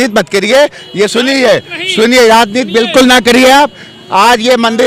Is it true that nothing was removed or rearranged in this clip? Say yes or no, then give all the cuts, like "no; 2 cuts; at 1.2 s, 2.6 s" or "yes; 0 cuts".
yes; 0 cuts